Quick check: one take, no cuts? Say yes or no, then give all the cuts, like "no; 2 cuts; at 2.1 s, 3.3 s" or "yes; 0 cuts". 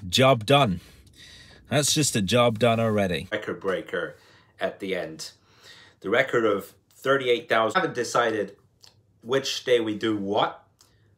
no; 2 cuts; at 3.3 s, 7.8 s